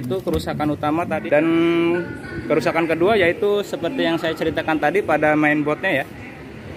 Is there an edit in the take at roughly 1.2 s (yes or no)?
yes